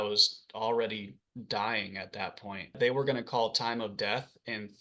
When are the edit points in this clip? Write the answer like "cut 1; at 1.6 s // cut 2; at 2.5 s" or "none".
cut 1; at 2.7 s